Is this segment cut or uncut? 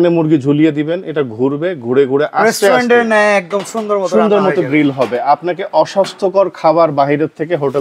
uncut